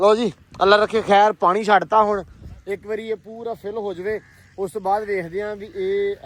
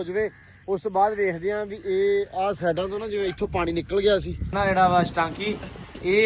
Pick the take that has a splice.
second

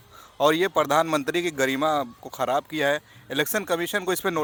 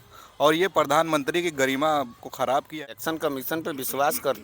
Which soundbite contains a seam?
second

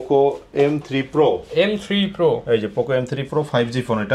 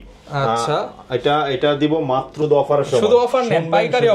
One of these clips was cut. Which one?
second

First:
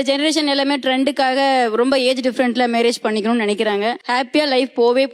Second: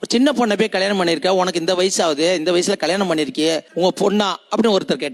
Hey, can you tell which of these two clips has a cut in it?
first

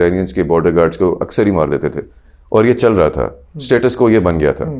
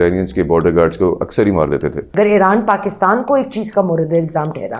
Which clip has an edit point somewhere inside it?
second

